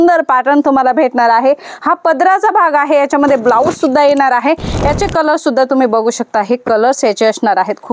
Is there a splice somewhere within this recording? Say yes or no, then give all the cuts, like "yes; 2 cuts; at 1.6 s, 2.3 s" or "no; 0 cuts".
yes; 1 cut; at 4.7 s